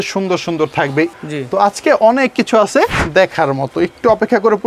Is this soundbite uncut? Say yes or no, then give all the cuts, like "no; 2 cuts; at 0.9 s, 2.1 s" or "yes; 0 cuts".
no; 2 cuts; at 1.1 s, 3.0 s